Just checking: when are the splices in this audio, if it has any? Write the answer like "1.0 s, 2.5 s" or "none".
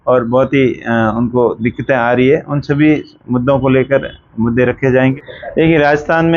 5.1 s